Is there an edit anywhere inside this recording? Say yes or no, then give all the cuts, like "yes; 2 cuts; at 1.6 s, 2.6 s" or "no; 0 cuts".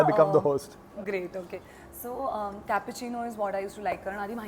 no; 0 cuts